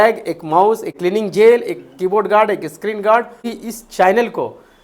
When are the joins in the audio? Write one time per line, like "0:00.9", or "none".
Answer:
0:00.9
0:03.5